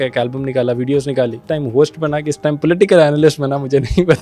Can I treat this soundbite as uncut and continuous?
no; 1 cut; at 1.4 s

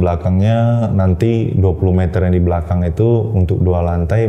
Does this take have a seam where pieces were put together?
no; 0 cuts

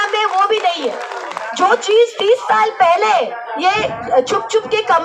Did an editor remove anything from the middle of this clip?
no; 0 cuts

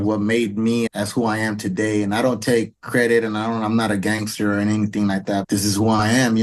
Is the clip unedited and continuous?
no; 2 cuts; at 0.9 s, 5.5 s

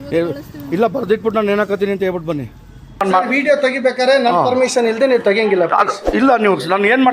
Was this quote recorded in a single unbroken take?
no; 1 cut; at 3.0 s

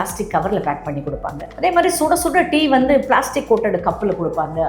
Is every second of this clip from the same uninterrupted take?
no; 1 cut; at 1.4 s

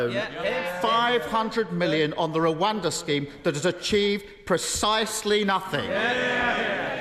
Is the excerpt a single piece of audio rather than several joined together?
yes; 0 cuts

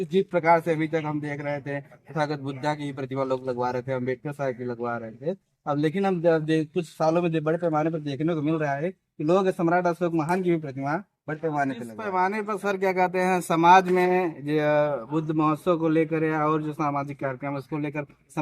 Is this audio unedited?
no; 1 cut; at 11.9 s

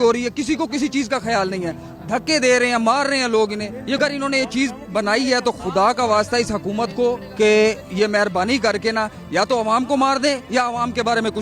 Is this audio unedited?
no; 1 cut; at 4.0 s

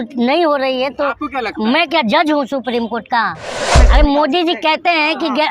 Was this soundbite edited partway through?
yes; 1 cut; at 3.7 s

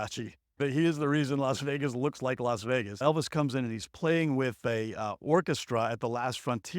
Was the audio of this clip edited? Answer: yes; 1 cut; at 3.0 s

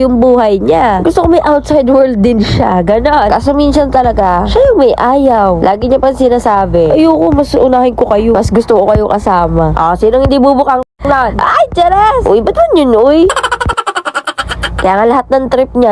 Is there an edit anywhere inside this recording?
no; 0 cuts

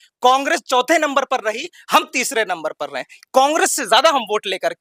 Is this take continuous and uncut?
yes; 0 cuts

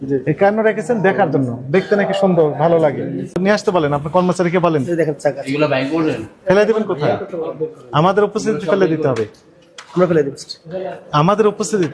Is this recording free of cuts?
no; 1 cut; at 3.4 s

